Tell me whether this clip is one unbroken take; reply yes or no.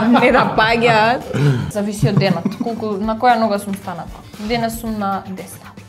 no